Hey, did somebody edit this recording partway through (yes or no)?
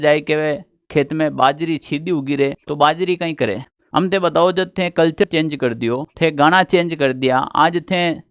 yes